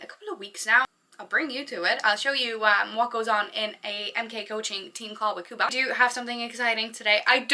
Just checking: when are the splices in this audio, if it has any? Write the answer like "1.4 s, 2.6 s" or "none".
0.9 s, 5.7 s